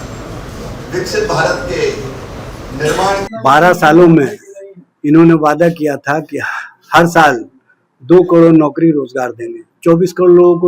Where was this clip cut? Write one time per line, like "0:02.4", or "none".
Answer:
0:03.3